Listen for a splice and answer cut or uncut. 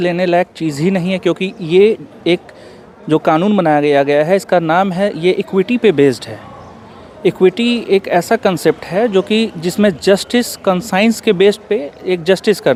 uncut